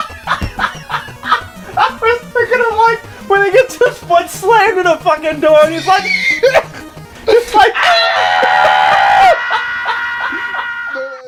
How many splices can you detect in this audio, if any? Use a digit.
0